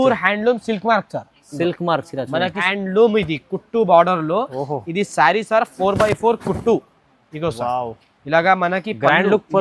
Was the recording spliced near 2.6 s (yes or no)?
yes